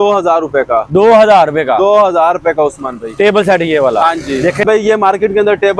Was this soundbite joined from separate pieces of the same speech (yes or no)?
yes